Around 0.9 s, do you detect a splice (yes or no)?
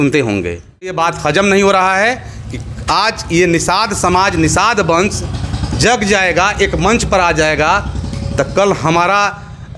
yes